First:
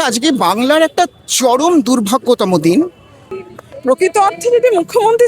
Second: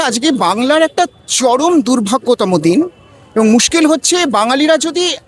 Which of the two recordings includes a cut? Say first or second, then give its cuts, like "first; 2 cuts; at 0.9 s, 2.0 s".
first; 1 cut; at 3.3 s